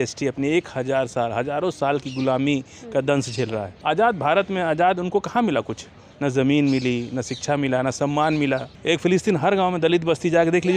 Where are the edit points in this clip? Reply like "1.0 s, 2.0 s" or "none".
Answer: 3.7 s, 8.7 s